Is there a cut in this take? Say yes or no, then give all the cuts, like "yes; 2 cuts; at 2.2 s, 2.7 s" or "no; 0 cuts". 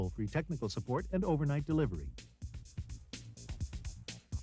yes; 1 cut; at 2.1 s